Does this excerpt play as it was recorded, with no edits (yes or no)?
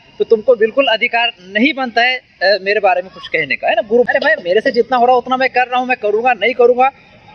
no